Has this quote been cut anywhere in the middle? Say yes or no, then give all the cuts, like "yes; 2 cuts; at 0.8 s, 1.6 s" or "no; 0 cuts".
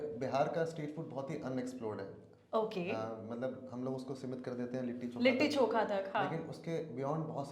no; 0 cuts